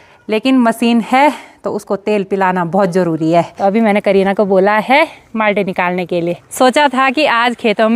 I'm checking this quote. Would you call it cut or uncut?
cut